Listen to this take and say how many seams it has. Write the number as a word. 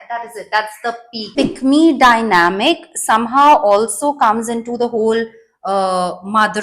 one